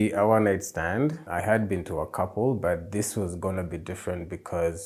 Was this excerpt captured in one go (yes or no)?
no